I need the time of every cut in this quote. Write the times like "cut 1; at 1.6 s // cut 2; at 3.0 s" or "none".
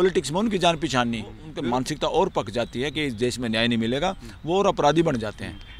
cut 1; at 1.4 s